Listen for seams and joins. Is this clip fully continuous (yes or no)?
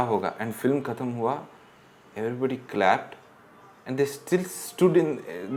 yes